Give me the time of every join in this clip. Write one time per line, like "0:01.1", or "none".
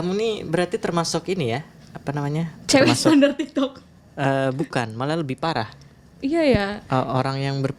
none